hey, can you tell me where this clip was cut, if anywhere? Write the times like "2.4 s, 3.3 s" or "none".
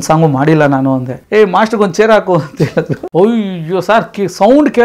1.1 s, 3.0 s